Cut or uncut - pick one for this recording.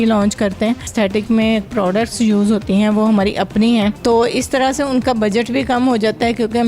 cut